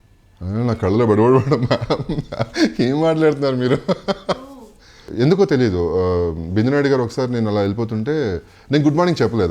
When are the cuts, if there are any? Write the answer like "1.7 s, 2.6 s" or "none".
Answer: 5.1 s